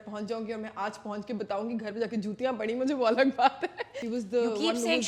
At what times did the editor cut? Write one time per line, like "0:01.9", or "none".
0:03.9